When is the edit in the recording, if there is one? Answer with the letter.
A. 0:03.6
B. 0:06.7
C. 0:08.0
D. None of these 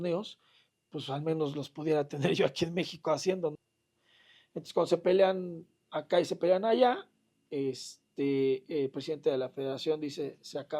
A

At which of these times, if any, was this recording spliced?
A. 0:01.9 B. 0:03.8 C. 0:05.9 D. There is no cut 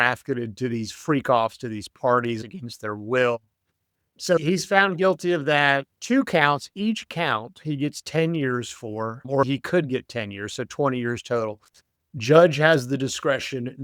C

